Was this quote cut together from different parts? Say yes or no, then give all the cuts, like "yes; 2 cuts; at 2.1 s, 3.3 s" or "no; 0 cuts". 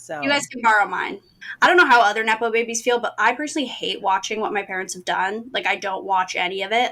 yes; 1 cut; at 1.4 s